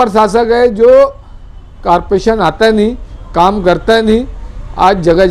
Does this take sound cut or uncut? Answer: uncut